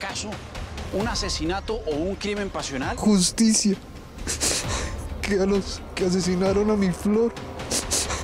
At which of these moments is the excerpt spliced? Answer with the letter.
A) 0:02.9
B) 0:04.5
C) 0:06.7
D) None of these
A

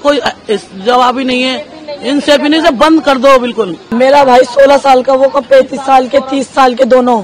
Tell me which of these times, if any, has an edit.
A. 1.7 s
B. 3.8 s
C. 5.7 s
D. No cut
B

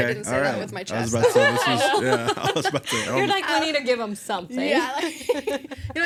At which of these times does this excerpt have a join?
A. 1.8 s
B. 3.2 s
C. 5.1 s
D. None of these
D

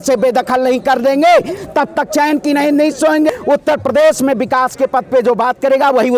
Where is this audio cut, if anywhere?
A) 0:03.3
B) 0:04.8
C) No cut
A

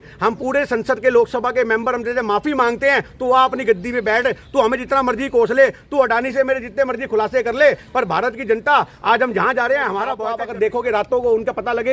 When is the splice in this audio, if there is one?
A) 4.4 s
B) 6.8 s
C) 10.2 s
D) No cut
C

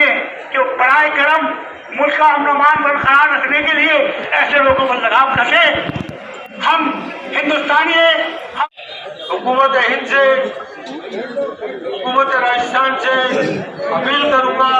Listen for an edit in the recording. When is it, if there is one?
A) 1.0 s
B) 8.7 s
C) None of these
B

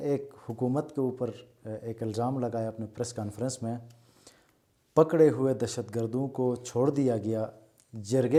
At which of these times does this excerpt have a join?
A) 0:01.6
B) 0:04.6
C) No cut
C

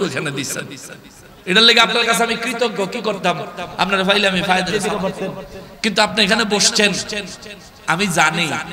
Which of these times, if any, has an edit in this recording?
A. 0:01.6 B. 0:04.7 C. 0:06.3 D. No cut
B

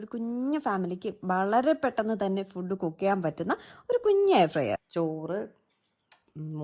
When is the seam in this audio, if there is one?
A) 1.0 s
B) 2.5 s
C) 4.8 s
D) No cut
C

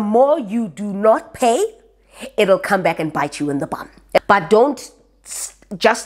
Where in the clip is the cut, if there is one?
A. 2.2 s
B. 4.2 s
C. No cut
B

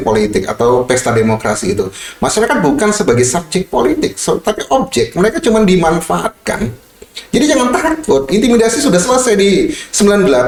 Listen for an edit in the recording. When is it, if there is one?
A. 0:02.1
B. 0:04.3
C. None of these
C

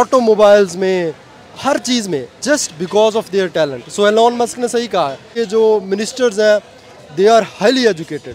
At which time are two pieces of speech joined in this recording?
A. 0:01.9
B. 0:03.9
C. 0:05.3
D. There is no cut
C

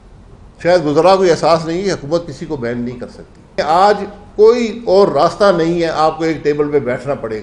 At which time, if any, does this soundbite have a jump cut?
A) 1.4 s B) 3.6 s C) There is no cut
B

